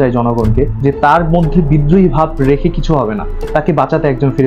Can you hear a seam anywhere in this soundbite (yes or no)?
no